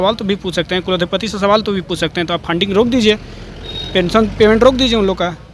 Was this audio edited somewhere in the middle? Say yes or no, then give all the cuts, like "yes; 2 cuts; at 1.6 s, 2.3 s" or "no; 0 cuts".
no; 0 cuts